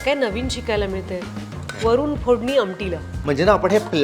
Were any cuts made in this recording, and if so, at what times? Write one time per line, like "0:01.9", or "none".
0:03.1